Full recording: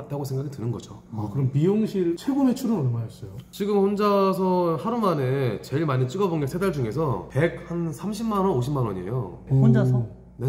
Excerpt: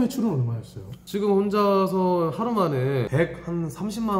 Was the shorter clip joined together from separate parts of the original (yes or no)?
yes